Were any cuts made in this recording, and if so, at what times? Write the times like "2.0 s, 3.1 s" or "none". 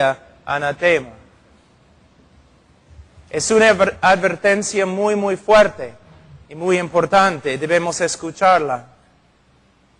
none